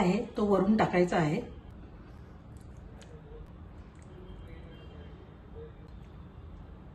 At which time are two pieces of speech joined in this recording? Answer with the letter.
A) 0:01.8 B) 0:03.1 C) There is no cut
C